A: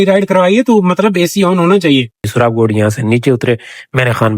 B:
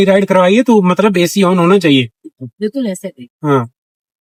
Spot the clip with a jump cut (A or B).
A